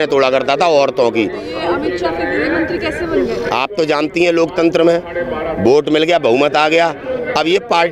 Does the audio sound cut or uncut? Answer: uncut